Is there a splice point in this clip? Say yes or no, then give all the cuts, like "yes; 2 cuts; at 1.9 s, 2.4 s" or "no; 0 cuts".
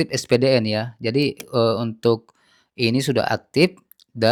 no; 0 cuts